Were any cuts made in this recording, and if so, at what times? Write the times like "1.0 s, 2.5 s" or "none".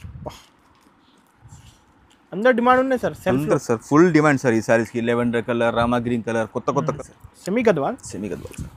6.9 s